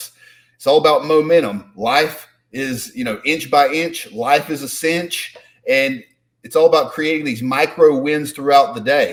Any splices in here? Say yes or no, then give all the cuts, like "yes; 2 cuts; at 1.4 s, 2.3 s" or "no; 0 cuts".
no; 0 cuts